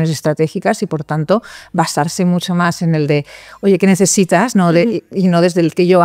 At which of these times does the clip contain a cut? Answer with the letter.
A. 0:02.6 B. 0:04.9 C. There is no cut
C